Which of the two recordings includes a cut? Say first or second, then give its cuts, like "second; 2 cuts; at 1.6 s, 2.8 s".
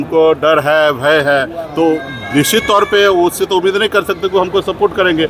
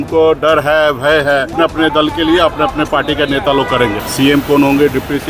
second; 2 cuts; at 1.5 s, 3.9 s